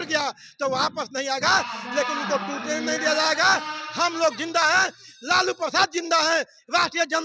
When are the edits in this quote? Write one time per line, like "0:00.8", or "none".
none